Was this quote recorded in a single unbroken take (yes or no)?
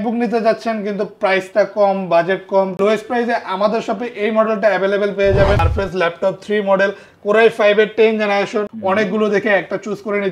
no